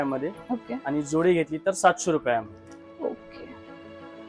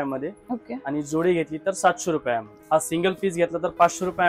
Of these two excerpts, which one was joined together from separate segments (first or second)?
second